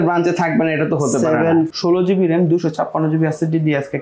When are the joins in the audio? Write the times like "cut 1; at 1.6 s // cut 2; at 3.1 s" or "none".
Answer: cut 1; at 1.7 s